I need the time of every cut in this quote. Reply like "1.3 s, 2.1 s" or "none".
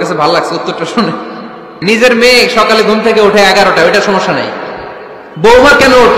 1.8 s